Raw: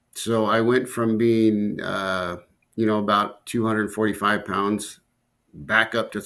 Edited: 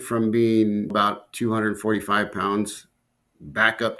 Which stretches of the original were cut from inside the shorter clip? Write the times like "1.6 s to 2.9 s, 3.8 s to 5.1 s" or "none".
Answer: 1.8 s to 3.0 s